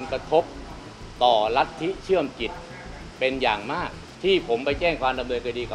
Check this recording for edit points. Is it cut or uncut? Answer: cut